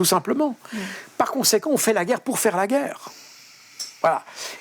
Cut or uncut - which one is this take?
uncut